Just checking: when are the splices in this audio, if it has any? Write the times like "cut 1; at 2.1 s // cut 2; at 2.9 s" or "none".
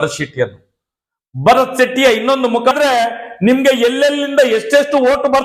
cut 1; at 2.7 s